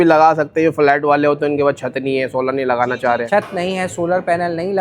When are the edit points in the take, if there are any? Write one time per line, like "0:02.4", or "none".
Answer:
0:02.9